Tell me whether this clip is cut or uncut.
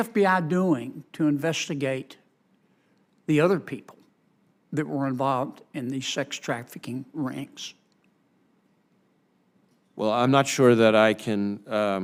uncut